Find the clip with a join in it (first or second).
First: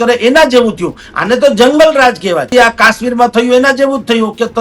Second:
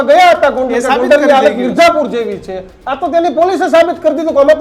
first